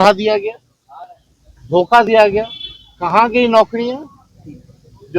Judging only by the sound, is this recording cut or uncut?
uncut